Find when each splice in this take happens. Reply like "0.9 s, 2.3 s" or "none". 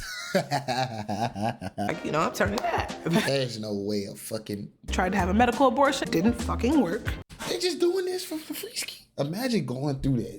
1.9 s, 4.9 s, 6.1 s

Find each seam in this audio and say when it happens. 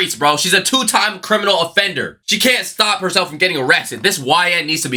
none

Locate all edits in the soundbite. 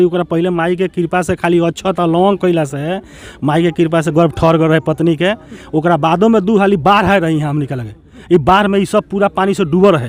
none

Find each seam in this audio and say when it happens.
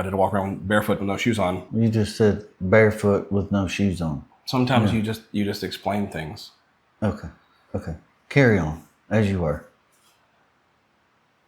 1.7 s, 4.3 s

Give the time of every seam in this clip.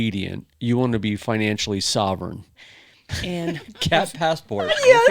2.5 s

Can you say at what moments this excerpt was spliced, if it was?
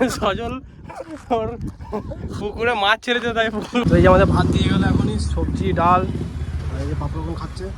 3.8 s

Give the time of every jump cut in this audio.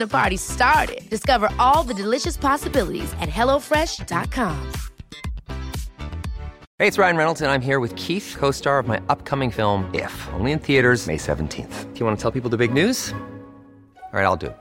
6.6 s

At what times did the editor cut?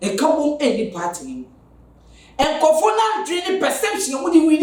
none

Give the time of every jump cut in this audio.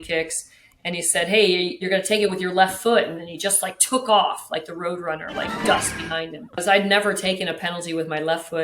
1.8 s, 6.6 s

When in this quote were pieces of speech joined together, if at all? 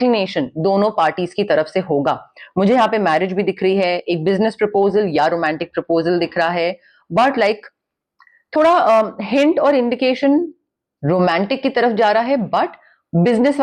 none

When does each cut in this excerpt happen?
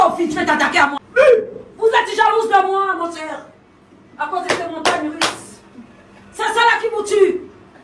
1.0 s

